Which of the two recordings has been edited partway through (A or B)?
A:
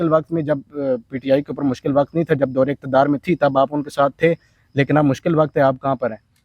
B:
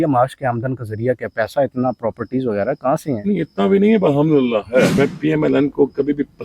B